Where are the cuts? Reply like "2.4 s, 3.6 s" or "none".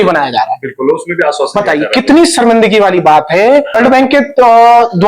3.8 s